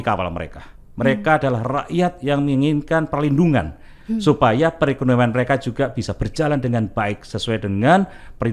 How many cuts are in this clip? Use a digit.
0